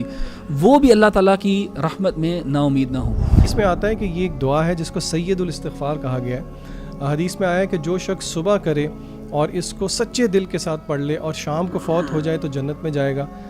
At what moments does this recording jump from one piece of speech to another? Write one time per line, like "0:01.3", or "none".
0:03.4